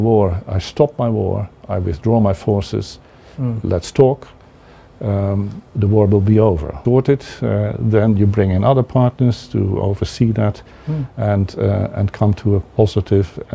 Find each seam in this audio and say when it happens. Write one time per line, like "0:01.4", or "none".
0:06.8